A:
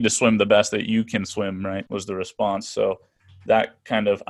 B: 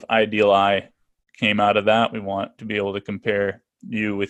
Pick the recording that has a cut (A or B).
A